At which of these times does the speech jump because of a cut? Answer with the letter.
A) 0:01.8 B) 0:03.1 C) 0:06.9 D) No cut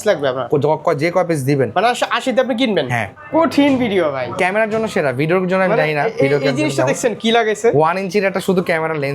B